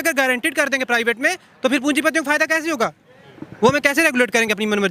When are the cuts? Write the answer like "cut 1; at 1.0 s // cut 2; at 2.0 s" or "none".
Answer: none